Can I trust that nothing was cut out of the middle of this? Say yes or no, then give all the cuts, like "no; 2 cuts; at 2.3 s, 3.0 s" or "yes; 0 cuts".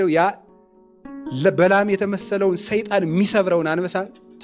yes; 0 cuts